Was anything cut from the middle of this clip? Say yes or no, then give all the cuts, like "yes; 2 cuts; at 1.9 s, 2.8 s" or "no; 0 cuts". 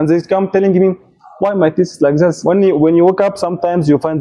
yes; 1 cut; at 2.4 s